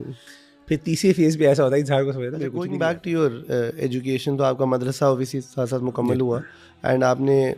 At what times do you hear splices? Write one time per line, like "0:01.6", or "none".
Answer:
0:02.5